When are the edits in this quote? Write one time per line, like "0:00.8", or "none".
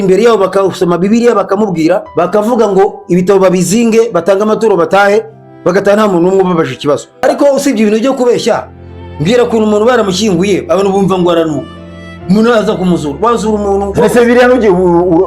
0:02.1
0:07.2